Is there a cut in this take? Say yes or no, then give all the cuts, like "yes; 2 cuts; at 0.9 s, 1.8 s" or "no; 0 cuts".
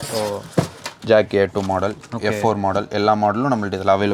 no; 0 cuts